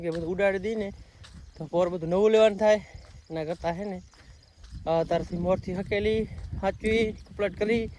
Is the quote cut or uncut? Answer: uncut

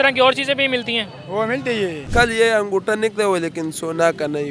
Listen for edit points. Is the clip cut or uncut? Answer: cut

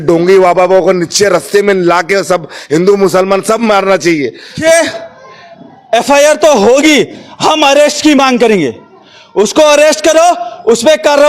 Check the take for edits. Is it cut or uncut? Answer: cut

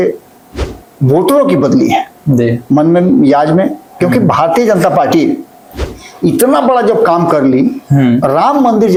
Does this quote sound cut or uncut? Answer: uncut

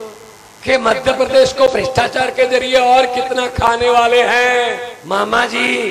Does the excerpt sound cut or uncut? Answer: cut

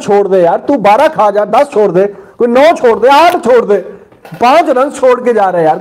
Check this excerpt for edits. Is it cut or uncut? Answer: uncut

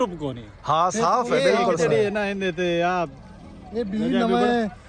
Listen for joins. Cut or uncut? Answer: uncut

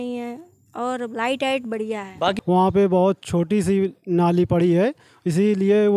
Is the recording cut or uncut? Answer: cut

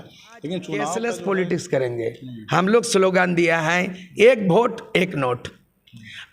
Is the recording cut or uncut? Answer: cut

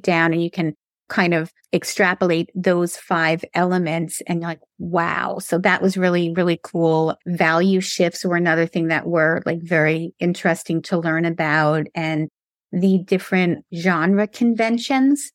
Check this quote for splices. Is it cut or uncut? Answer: cut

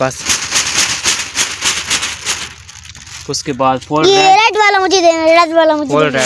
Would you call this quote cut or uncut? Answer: uncut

